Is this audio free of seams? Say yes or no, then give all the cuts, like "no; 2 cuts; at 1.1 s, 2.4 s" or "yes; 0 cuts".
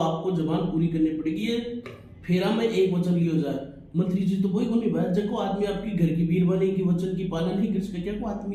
yes; 0 cuts